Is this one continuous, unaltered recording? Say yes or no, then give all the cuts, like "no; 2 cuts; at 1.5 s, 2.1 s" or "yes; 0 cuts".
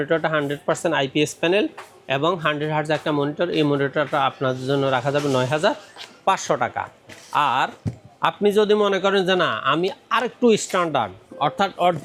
yes; 0 cuts